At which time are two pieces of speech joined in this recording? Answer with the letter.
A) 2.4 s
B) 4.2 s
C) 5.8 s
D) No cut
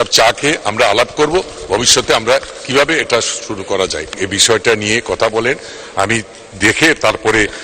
B